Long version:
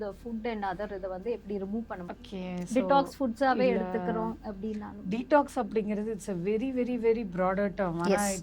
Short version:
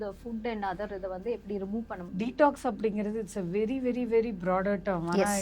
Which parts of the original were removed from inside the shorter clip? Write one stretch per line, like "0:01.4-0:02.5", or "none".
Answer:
0:02.0-0:04.9